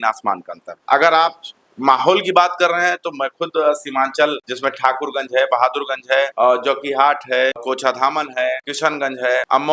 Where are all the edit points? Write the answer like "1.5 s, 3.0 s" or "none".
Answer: none

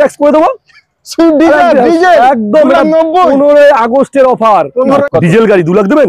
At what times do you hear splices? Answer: 5.0 s

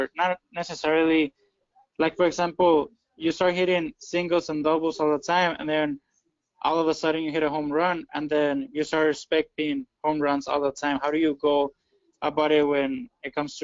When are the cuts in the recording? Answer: none

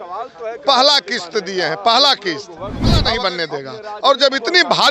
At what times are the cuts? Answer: 3.0 s

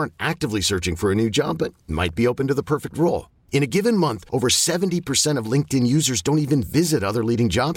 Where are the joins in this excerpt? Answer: none

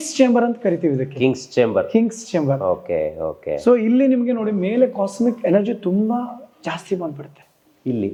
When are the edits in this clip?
none

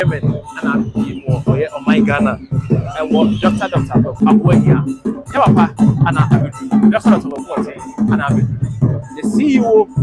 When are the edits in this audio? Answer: 4.1 s

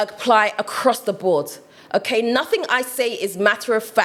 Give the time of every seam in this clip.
none

